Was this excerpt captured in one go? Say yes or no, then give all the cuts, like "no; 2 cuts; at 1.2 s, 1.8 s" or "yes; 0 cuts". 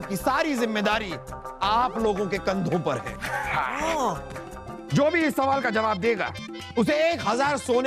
no; 2 cuts; at 1.5 s, 4.7 s